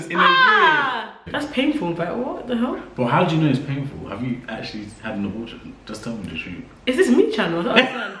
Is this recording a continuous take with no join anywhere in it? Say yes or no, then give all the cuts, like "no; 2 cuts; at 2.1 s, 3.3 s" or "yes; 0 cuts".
no; 1 cut; at 1.2 s